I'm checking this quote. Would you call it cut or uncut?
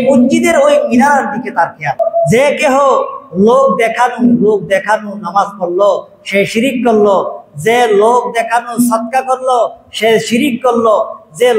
cut